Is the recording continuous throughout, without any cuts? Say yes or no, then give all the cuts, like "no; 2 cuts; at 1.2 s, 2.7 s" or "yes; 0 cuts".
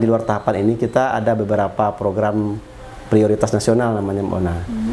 yes; 0 cuts